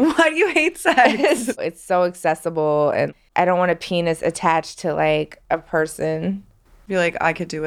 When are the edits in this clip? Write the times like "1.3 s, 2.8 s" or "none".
1.6 s, 5.4 s